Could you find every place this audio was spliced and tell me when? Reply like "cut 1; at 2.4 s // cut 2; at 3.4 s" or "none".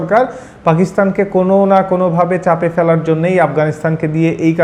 none

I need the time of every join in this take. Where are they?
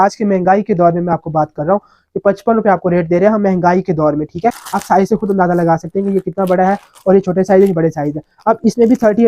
cut 1; at 4.4 s

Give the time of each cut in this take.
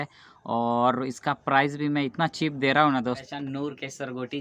cut 1; at 3.2 s

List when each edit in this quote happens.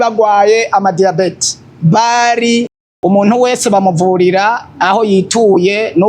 cut 1; at 2.8 s

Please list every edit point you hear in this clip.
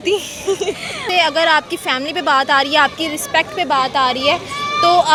none

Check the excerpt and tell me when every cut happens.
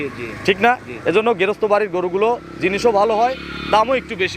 none

